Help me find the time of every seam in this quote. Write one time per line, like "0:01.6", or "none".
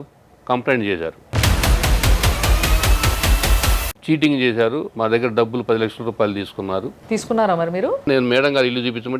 0:03.9
0:08.0

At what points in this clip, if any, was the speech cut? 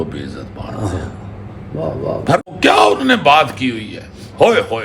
0:02.4

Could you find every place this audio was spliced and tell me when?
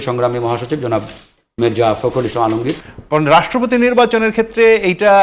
0:02.8

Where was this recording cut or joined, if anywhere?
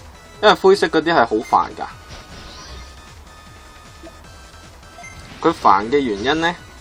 0:05.2

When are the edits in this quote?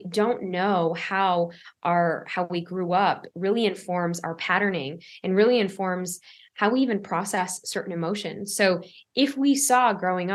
none

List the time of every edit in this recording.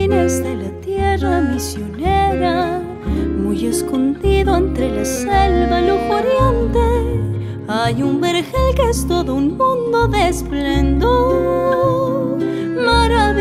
none

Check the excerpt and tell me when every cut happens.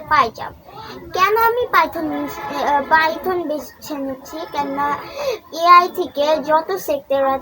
none

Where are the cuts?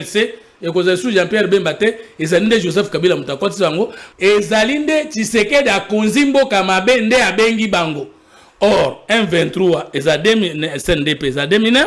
0:04.0

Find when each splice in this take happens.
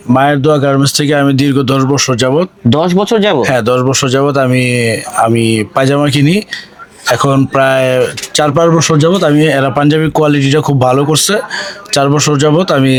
none

